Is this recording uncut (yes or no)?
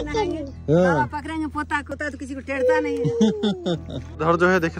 yes